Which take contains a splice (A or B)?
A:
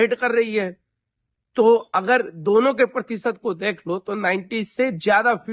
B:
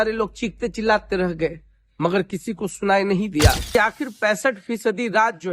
B